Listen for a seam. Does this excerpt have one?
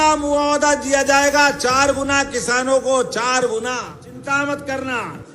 yes; 1 cut; at 4.2 s

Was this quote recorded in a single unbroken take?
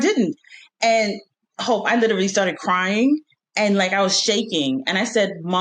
yes; 0 cuts

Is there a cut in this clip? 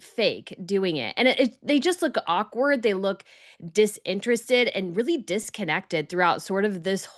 no; 0 cuts

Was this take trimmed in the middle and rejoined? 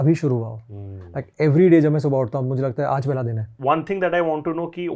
yes; 1 cut; at 3.6 s

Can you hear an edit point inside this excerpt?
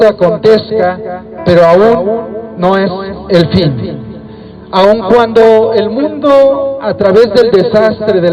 no; 0 cuts

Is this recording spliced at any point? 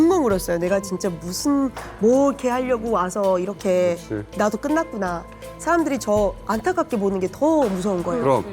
no; 0 cuts

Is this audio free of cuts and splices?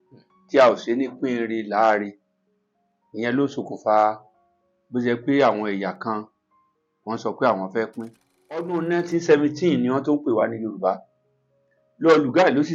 no; 1 cut; at 8.7 s

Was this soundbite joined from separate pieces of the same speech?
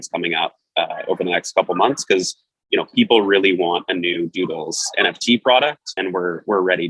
yes; 1 cut; at 6.0 s

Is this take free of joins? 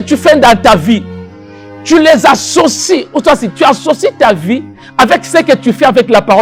yes; 0 cuts

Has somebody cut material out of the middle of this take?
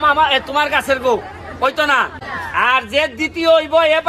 yes; 1 cut; at 2.3 s

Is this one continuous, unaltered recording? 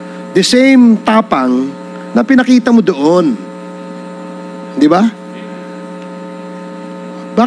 yes; 0 cuts

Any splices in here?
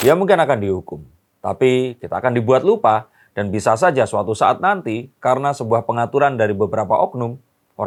no; 0 cuts

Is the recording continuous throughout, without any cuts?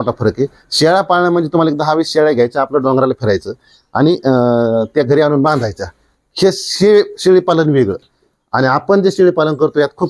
yes; 0 cuts

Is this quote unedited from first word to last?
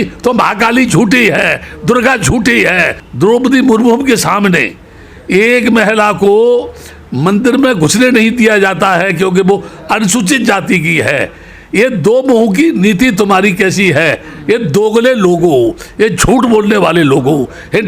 no; 1 cut; at 3.0 s

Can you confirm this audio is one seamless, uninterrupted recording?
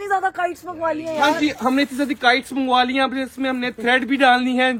yes; 0 cuts

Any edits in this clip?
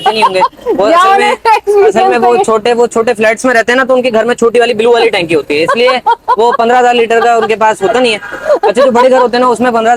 no; 0 cuts

